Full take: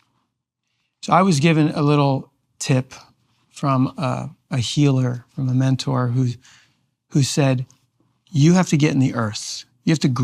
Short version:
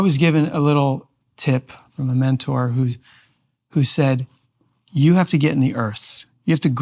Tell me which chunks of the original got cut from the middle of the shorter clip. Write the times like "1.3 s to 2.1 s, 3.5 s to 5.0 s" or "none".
3.1 s to 5.3 s